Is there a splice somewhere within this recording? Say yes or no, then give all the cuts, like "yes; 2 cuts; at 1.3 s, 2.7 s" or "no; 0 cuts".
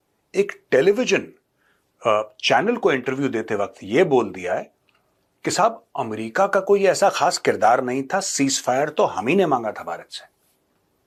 no; 0 cuts